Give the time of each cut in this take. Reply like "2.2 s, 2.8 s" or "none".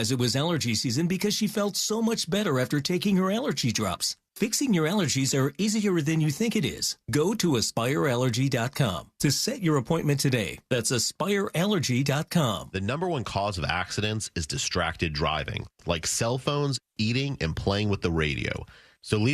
12.7 s